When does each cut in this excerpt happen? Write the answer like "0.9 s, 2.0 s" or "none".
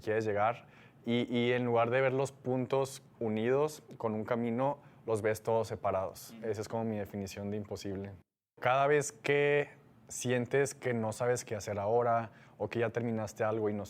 8.6 s